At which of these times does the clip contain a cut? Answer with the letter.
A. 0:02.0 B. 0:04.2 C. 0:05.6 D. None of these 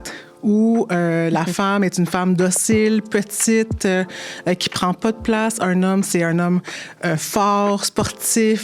D